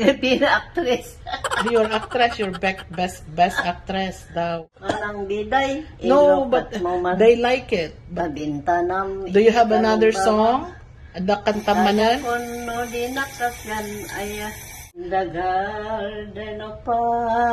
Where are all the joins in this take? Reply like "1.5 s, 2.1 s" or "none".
4.7 s, 15.0 s